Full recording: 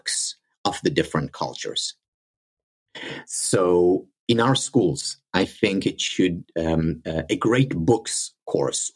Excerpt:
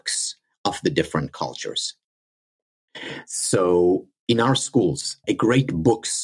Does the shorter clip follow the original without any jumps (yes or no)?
no